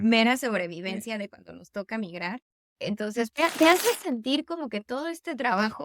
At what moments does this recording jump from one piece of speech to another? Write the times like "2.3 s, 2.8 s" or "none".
3.3 s